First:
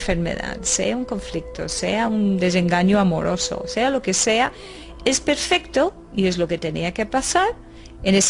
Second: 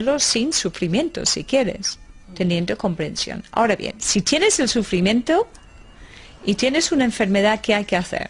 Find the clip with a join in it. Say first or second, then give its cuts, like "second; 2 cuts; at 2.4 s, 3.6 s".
first; 1 cut; at 6.8 s